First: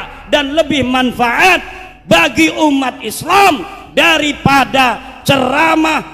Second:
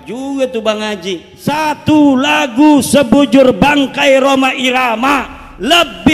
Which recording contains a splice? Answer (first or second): second